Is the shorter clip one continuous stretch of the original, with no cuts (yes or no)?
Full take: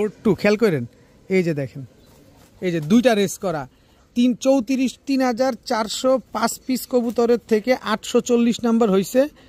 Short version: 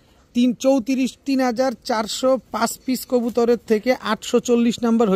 yes